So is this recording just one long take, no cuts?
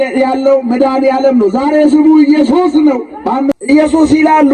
no; 1 cut; at 3.5 s

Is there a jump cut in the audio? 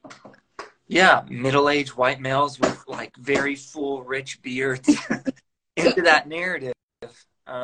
no; 0 cuts

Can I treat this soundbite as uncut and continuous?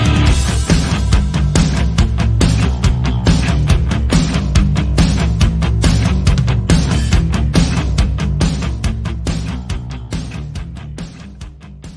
yes; 0 cuts

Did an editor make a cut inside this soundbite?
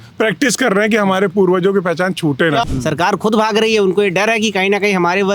yes; 1 cut; at 2.7 s

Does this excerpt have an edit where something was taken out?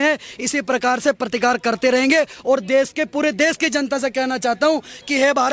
no; 0 cuts

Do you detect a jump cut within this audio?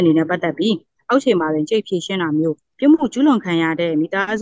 yes; 1 cut; at 2.7 s

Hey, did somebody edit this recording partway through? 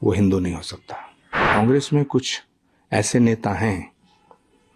yes; 1 cut; at 1.4 s

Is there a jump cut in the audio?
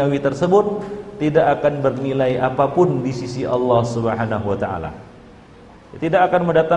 no; 0 cuts

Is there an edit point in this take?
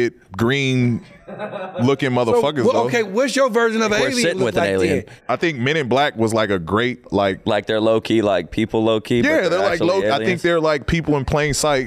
yes; 2 cuts; at 5.2 s, 7.0 s

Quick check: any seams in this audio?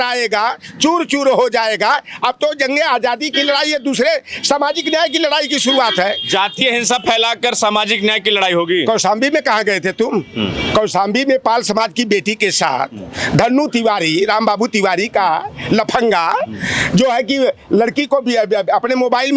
no; 0 cuts

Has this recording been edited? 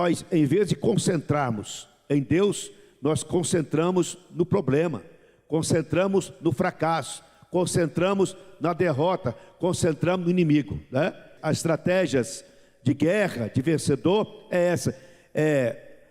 yes; 1 cut; at 11.3 s

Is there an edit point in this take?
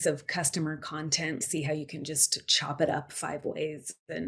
no; 0 cuts

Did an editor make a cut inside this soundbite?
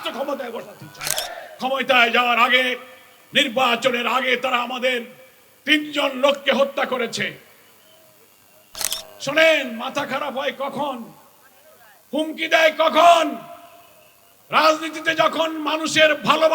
yes; 2 cuts; at 1.2 s, 8.7 s

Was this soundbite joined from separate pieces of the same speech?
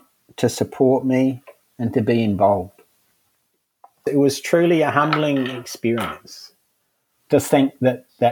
yes; 1 cut; at 4.0 s

